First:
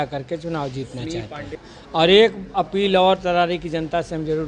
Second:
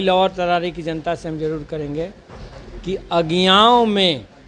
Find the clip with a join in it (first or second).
first